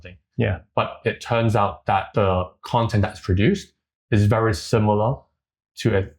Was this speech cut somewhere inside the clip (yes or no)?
yes